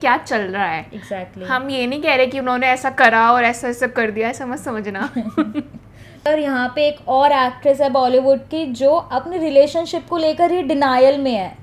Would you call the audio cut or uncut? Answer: cut